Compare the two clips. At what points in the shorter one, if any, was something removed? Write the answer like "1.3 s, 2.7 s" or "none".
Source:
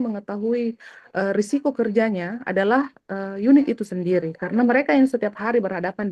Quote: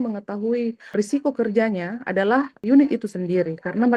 0.9 s, 2.6 s